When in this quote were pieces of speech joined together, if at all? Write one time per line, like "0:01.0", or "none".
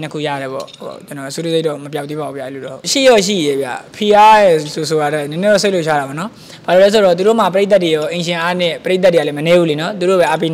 0:02.7